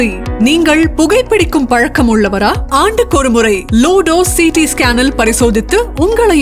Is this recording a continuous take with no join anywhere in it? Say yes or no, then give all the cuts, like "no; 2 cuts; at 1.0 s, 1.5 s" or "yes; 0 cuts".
yes; 0 cuts